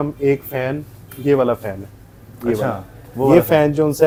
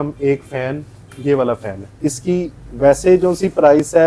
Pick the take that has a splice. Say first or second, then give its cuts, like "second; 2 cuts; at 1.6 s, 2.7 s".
second; 1 cut; at 2.0 s